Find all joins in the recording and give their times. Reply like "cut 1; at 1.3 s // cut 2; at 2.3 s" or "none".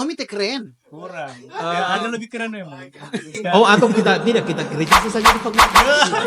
none